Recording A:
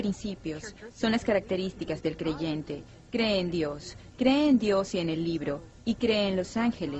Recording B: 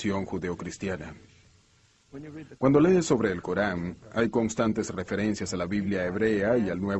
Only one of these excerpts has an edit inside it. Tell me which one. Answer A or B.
A